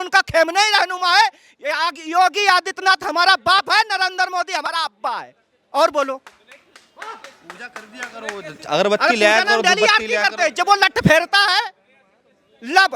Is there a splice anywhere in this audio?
no; 0 cuts

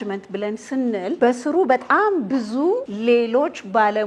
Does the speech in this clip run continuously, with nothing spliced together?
no; 2 cuts; at 1.2 s, 2.9 s

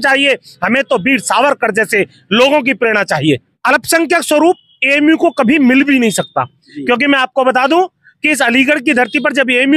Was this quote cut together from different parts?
yes; 1 cut; at 3.5 s

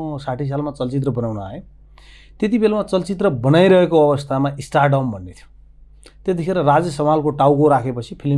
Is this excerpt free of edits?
yes; 0 cuts

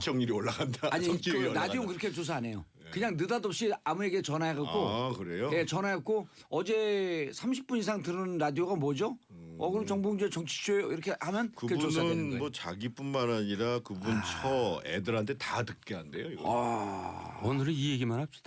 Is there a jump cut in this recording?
yes; 1 cut; at 11.9 s

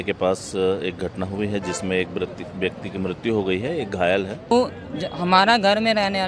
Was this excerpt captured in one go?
no; 1 cut; at 4.5 s

